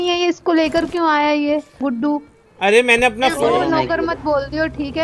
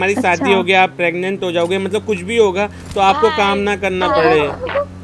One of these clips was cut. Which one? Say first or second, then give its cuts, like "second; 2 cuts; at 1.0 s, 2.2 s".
first; 1 cut; at 3.5 s